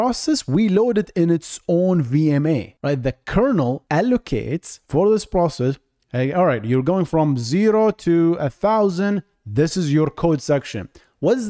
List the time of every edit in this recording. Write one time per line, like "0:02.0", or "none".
0:02.7
0:03.8

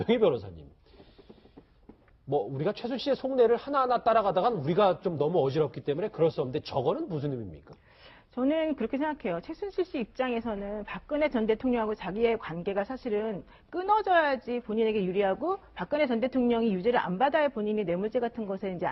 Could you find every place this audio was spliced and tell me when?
none

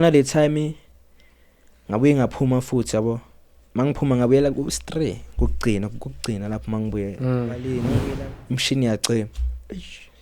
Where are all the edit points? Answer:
0:07.8

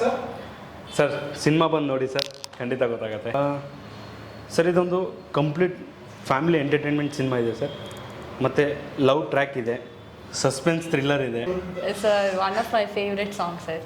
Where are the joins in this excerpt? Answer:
0:03.3
0:11.5

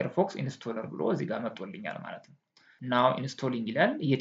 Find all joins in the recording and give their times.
0:02.7

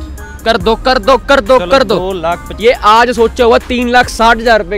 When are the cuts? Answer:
0:02.5

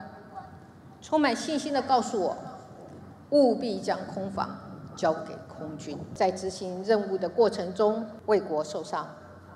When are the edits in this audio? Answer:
0:06.1
0:08.1

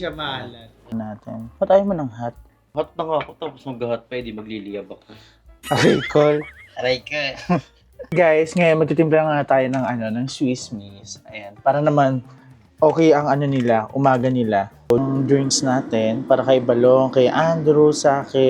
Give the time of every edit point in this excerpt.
0:00.9
0:08.1
0:15.0

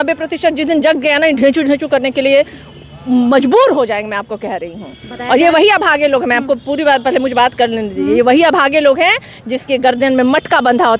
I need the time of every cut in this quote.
none

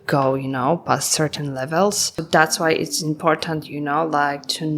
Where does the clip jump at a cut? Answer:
0:02.2

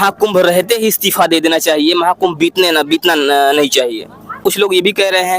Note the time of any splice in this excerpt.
0:04.4

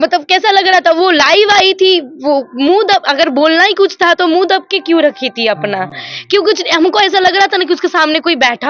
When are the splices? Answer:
none

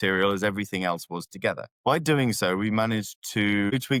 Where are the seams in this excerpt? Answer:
none

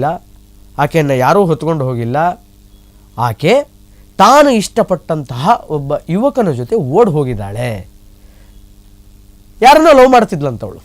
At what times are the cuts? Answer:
none

